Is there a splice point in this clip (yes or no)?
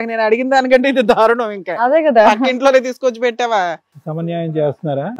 no